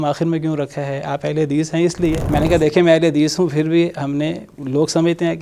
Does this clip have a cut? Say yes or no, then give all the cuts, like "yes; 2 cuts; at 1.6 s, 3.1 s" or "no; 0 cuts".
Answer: yes; 1 cut; at 2.2 s